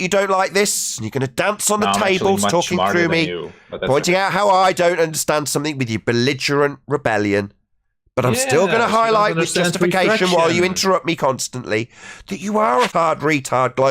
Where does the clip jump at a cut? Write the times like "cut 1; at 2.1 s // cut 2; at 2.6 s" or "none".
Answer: cut 1; at 12.9 s